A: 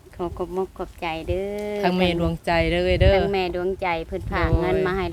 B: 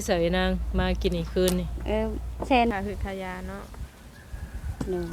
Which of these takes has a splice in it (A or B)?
B